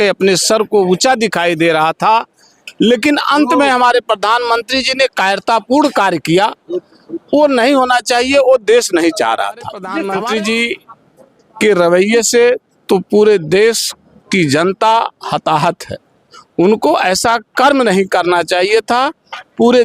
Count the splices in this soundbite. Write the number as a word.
one